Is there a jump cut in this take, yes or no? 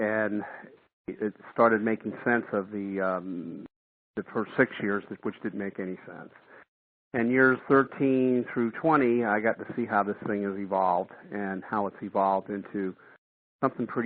no